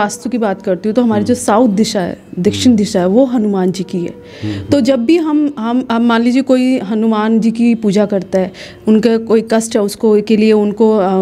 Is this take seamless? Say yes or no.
yes